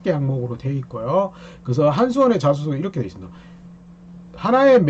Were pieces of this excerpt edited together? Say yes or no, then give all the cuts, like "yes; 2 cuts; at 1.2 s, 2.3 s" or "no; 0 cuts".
no; 0 cuts